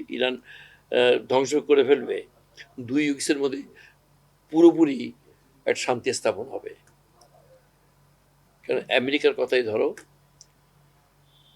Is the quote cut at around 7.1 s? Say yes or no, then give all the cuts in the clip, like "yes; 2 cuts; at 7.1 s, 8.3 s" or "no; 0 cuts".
no; 0 cuts